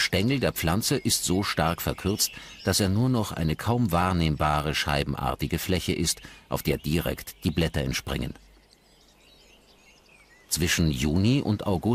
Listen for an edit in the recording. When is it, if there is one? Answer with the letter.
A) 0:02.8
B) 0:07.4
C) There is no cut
A